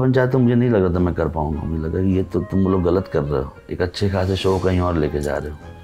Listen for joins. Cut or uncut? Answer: uncut